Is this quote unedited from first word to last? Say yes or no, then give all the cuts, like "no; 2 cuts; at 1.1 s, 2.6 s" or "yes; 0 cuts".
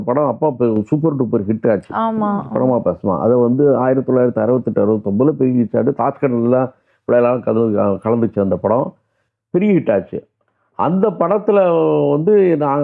yes; 0 cuts